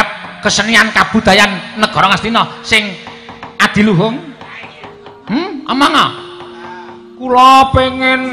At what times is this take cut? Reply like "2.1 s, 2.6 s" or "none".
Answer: none